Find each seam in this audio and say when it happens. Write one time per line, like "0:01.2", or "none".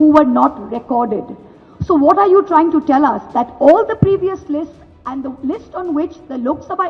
none